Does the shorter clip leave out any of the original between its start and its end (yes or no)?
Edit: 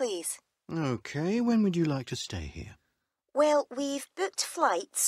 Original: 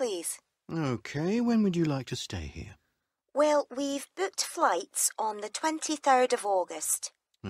no